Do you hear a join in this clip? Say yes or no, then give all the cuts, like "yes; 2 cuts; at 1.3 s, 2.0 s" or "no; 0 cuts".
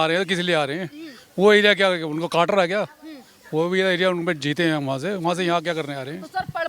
no; 0 cuts